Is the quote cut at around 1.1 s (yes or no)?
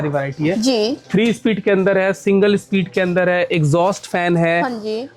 no